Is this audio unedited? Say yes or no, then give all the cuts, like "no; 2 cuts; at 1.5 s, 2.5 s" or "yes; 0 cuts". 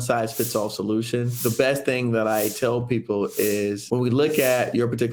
yes; 0 cuts